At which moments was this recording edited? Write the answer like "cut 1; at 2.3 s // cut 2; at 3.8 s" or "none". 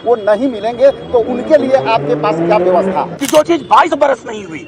cut 1; at 3.2 s